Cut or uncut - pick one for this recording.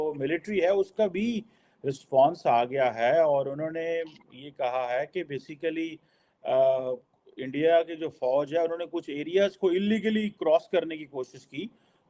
uncut